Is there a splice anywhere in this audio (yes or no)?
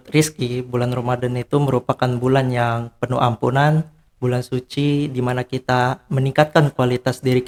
no